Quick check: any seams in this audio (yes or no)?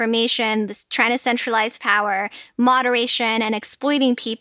no